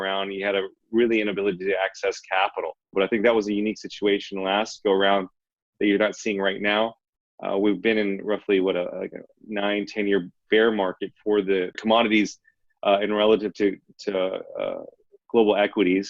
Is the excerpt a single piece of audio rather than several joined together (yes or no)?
no